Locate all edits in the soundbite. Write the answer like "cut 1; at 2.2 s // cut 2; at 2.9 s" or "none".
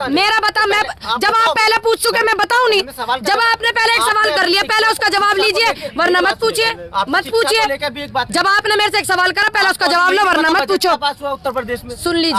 none